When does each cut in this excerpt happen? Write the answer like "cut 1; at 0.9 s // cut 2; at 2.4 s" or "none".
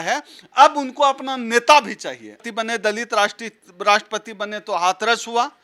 cut 1; at 2.3 s